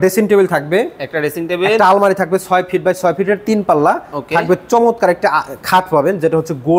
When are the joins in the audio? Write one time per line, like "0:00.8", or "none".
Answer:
none